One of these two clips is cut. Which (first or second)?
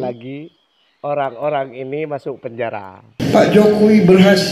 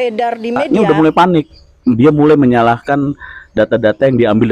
first